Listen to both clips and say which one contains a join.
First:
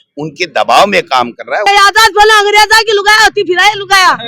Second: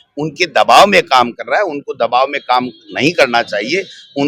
first; 1 cut; at 1.6 s

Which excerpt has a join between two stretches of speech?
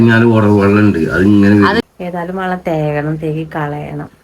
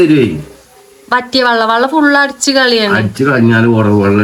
first; 1 cut; at 1.8 s

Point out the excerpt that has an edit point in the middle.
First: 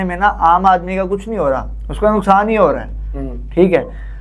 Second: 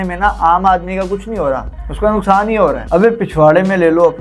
second; 1 cut; at 2.8 s

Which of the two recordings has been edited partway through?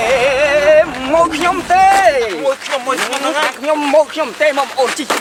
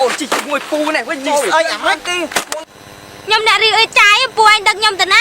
second; 1 cut; at 2.7 s

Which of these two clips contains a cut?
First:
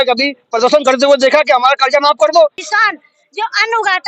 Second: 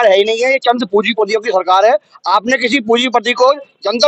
first; 1 cut; at 2.6 s

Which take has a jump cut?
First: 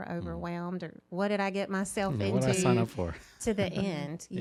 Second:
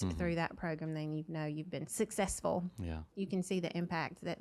second; 2 cuts; at 1.9 s, 3.1 s

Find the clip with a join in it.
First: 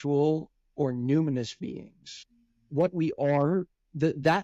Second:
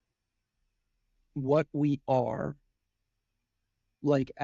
first; 1 cut; at 2.1 s

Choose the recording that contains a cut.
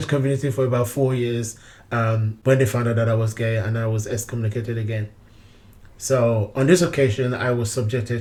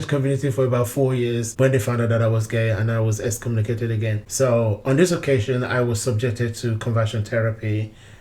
second; 2 cuts; at 1.5 s, 4.2 s

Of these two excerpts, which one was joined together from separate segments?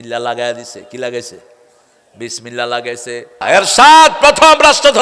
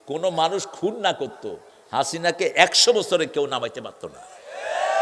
first; 1 cut; at 3.4 s

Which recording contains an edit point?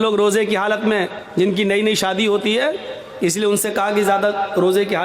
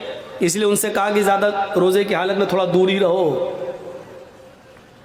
first; 1 cut; at 1.2 s

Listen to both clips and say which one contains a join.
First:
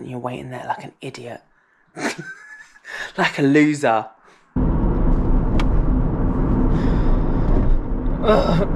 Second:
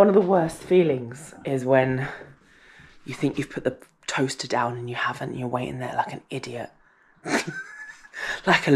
first; 1 cut; at 4.5 s

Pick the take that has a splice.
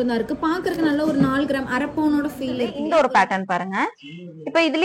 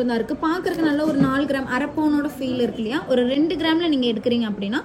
first; 1 cut; at 2.8 s

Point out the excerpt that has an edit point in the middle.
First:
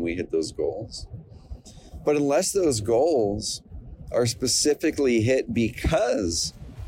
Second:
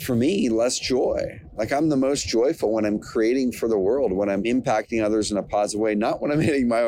second; 1 cut; at 4.5 s

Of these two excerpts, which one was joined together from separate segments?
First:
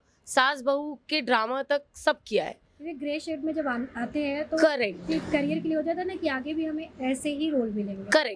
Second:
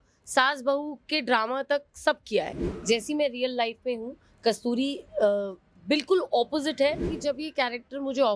second; 2 cuts; at 2.6 s, 7.1 s

